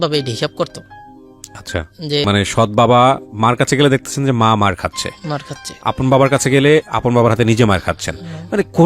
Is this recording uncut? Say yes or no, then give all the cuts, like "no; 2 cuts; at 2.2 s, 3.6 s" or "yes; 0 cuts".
no; 1 cut; at 2.2 s